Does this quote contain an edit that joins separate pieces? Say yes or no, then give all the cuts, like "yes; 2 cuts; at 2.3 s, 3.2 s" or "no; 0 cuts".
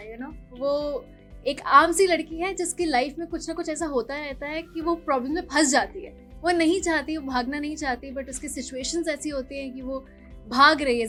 no; 0 cuts